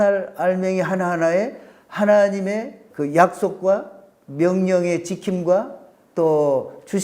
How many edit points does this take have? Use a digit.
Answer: 1